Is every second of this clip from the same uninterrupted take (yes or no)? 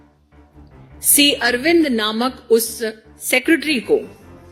yes